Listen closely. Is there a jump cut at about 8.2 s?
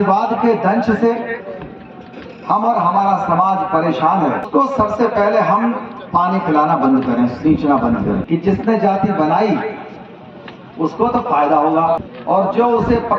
yes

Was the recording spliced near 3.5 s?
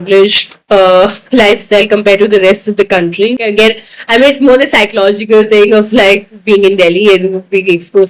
yes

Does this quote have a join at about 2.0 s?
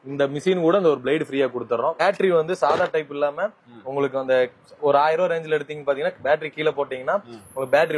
yes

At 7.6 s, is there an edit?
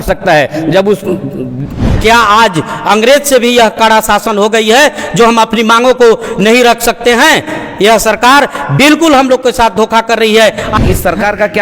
no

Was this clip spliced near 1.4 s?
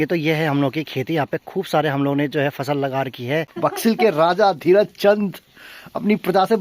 no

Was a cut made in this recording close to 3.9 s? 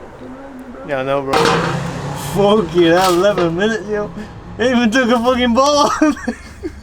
no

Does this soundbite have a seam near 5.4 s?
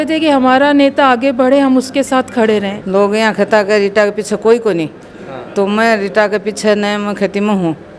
no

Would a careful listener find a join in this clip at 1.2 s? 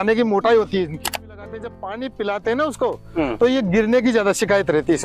yes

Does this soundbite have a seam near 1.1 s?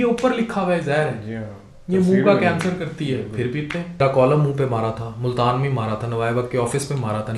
no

